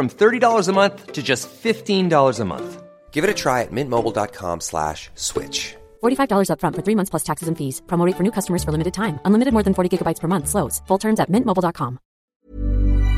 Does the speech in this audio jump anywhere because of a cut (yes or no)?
yes